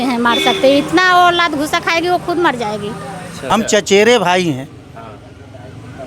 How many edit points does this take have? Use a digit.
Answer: 1